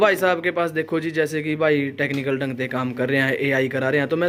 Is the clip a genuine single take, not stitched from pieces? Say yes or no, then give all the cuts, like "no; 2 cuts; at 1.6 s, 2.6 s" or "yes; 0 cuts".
yes; 0 cuts